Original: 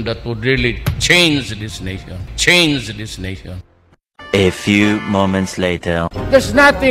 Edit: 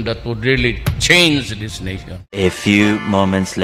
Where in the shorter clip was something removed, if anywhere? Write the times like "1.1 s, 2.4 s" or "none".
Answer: 2.4 s